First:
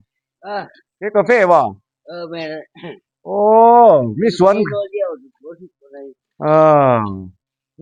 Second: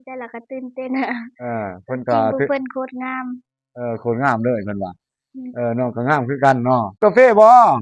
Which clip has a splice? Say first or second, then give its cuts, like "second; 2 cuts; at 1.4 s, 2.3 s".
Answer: second; 1 cut; at 6.9 s